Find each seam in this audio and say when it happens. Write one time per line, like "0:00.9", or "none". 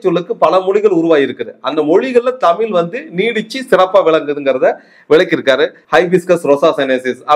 0:05.8